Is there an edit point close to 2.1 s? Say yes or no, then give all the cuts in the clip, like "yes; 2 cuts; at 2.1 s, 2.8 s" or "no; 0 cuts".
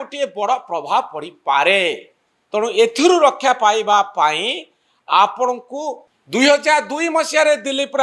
no; 1 cut; at 6.0 s